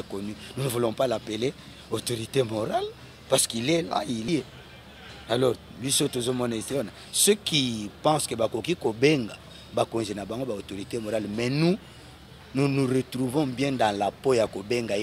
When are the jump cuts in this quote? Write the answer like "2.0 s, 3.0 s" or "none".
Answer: 4.3 s